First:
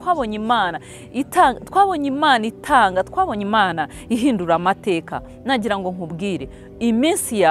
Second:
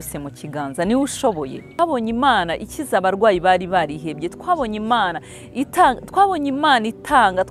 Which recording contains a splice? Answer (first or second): second